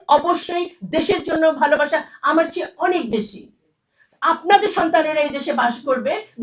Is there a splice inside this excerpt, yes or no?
no